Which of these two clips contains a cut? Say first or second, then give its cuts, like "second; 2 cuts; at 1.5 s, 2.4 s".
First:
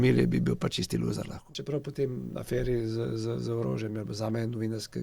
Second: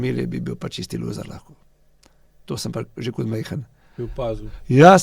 first; 1 cut; at 1.6 s